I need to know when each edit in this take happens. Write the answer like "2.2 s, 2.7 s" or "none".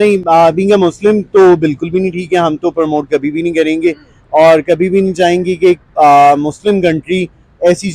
none